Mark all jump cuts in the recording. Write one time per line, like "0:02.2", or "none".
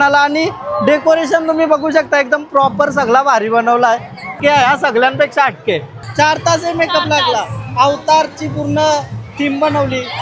0:04.3
0:05.9